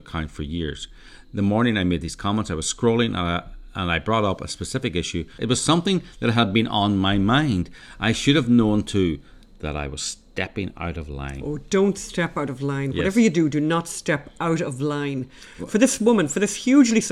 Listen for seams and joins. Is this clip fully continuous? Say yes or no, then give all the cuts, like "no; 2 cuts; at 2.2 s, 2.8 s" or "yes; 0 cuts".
no; 3 cuts; at 5.3 s, 7.8 s, 15.5 s